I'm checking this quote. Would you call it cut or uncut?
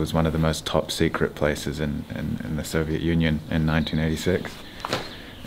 uncut